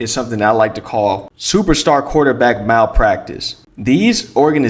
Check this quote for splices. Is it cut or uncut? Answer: uncut